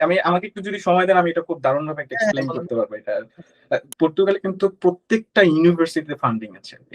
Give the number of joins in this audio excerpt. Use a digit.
1